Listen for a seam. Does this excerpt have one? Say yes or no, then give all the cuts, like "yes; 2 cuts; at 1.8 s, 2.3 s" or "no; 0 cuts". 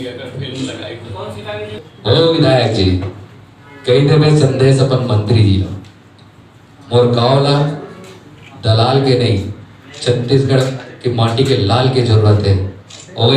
yes; 1 cut; at 1.3 s